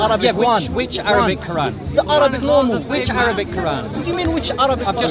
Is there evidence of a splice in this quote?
no; 0 cuts

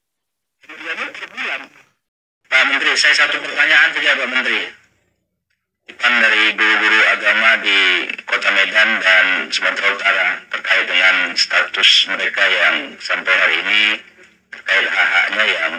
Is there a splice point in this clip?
yes; 1 cut; at 2.3 s

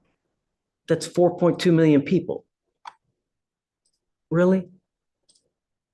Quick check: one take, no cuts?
yes; 0 cuts

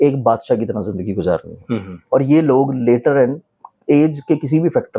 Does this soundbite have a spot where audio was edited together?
no; 0 cuts

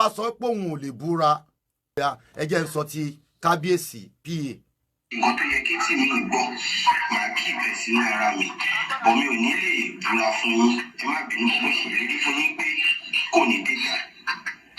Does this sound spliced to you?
yes; 1 cut; at 2.0 s

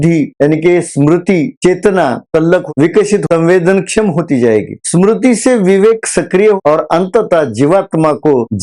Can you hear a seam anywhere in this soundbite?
yes; 2 cuts; at 3.0 s, 6.6 s

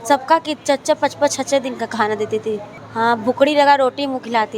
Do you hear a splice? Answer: yes; 1 cut; at 2.8 s

